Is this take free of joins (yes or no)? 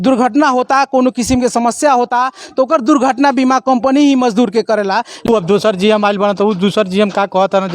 no